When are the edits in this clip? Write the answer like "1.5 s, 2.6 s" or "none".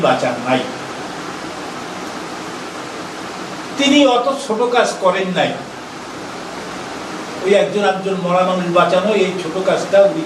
none